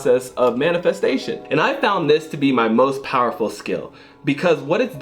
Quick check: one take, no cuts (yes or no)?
no